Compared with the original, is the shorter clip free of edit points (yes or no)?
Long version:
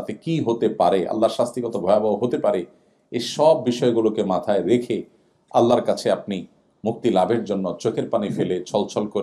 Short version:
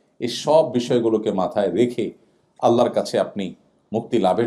yes